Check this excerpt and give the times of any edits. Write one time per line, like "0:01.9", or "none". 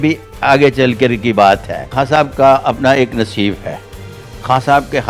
0:01.9